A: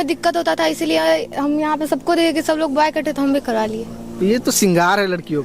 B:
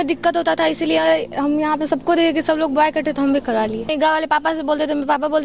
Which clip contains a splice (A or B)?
B